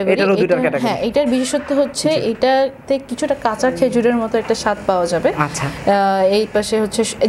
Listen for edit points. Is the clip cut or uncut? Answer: uncut